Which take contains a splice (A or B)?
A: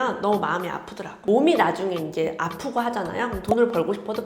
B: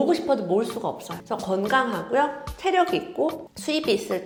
A